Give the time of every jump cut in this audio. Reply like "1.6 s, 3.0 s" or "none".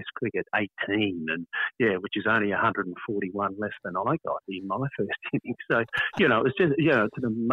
none